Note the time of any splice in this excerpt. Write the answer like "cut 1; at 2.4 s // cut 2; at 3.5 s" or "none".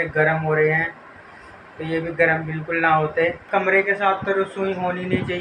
none